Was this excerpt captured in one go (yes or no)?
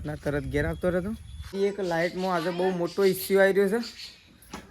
no